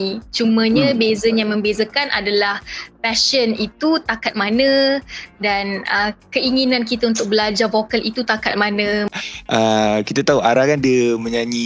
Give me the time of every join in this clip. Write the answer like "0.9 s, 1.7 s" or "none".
9.1 s